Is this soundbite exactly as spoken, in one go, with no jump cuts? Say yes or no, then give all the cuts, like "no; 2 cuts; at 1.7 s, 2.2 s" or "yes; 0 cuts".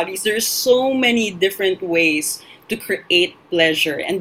yes; 0 cuts